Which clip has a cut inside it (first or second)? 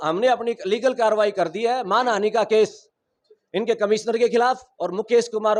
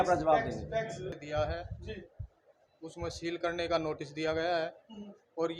second